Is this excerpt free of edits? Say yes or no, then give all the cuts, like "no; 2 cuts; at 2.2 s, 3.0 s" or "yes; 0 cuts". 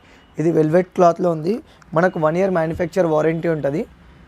yes; 0 cuts